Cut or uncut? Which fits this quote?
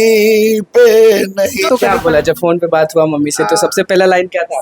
cut